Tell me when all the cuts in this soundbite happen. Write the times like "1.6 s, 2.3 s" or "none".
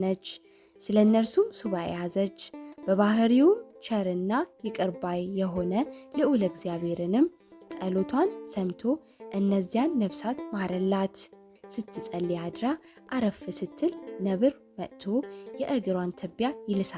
11.6 s